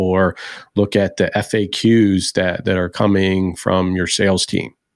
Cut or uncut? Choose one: uncut